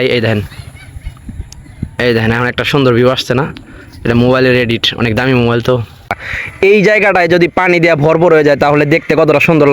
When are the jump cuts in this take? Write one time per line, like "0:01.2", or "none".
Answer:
0:06.1